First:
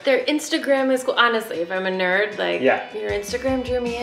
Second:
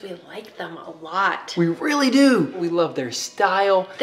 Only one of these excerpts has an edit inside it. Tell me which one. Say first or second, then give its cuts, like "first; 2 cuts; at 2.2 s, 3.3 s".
second; 1 cut; at 2.6 s